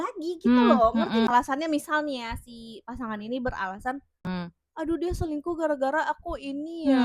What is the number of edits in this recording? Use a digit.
2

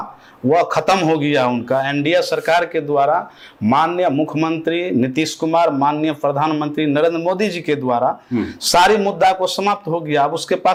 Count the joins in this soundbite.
0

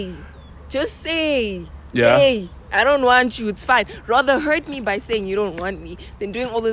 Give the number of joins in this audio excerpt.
0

